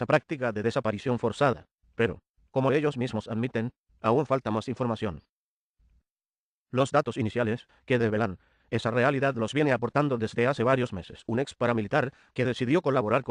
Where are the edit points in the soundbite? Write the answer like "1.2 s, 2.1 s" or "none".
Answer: none